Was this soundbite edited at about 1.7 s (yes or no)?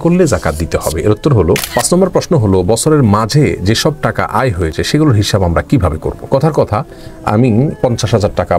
yes